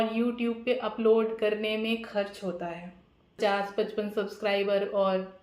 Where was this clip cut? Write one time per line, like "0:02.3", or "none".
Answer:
0:03.4